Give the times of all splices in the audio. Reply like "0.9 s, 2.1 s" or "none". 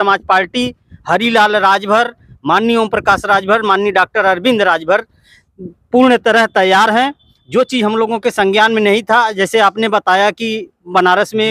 none